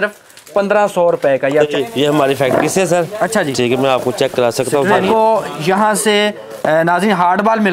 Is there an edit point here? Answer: yes; 2 cuts; at 1.7 s, 5.1 s

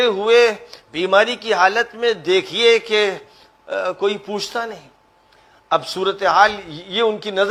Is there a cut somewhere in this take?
no; 0 cuts

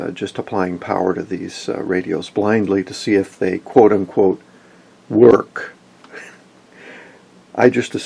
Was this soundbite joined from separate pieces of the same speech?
yes; 1 cut; at 5.9 s

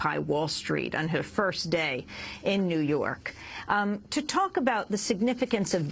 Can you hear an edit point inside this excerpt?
yes; 1 cut; at 4.5 s

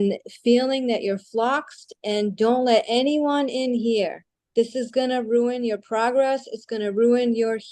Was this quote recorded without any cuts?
yes; 0 cuts

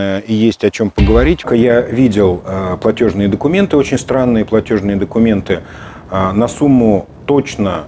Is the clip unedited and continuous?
no; 1 cut; at 1.4 s

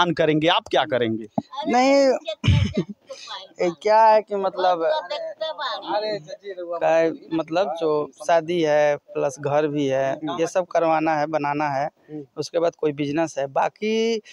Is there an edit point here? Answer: no; 0 cuts

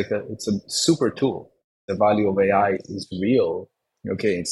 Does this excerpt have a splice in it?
yes; 1 cut; at 1.9 s

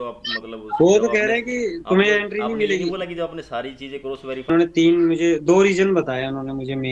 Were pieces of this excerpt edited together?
yes; 1 cut; at 4.5 s

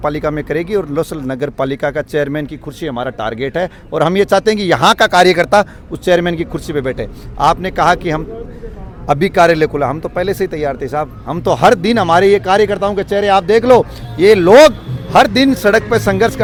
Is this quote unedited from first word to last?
yes; 0 cuts

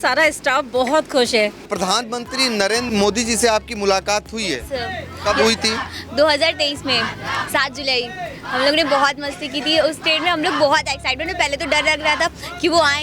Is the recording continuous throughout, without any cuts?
no; 2 cuts; at 1.7 s, 2.9 s

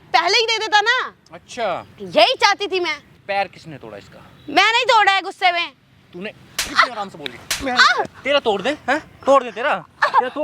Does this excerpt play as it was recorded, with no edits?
no; 1 cut; at 3.1 s

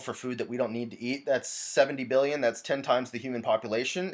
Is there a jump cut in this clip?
no; 0 cuts

